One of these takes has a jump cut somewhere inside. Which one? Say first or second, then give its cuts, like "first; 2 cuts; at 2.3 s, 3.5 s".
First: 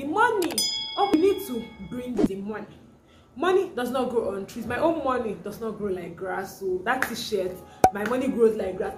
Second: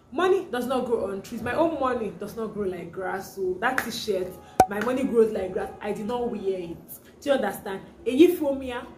first; 1 cut; at 1.1 s